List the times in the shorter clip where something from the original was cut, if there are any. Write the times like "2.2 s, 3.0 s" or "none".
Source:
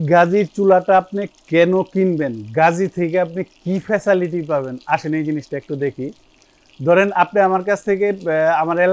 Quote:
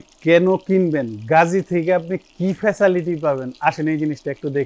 none